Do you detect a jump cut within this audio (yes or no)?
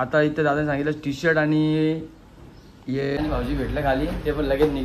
yes